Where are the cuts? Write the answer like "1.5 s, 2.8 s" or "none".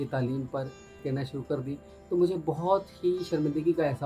1.0 s